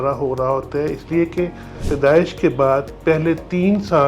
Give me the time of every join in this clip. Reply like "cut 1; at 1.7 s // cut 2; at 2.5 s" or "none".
cut 1; at 1.9 s